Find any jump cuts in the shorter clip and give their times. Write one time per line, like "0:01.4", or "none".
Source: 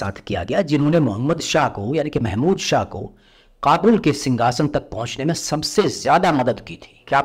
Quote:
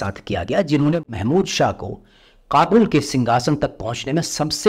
0:01.0